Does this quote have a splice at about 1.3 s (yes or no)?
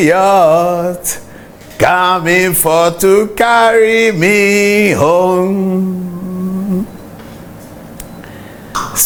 no